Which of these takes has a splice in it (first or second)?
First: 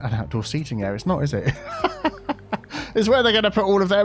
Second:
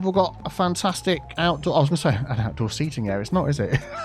second